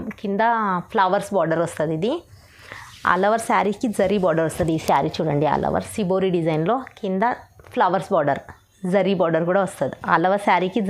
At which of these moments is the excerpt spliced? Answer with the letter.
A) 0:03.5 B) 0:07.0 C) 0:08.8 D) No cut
D